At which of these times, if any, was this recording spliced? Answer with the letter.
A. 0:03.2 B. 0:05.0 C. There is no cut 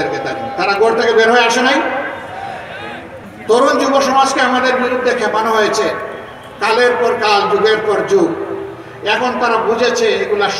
A